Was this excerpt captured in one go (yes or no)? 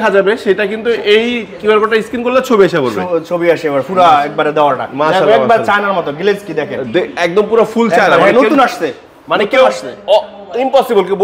yes